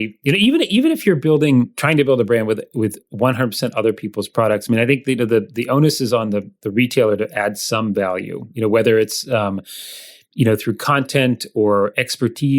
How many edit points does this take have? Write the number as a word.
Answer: one